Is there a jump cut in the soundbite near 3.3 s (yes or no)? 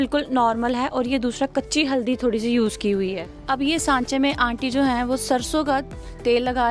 yes